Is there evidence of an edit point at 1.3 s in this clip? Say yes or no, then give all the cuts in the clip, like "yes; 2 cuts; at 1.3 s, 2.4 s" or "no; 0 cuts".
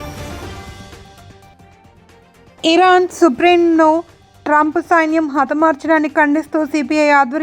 yes; 1 cut; at 1.3 s